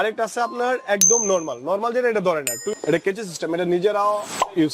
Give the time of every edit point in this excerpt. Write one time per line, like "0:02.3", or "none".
0:02.7